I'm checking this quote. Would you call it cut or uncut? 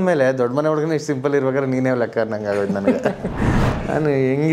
cut